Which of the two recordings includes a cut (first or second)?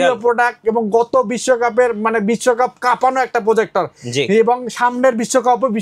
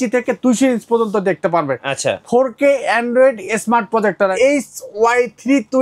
second